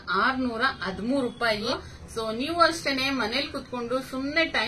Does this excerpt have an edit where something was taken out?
yes; 1 cut; at 1.7 s

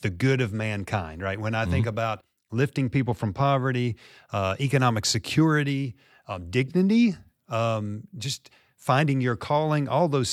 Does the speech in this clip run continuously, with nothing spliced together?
yes; 0 cuts

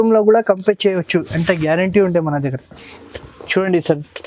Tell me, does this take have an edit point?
no; 0 cuts

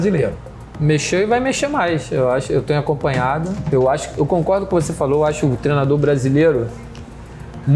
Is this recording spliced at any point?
no; 0 cuts

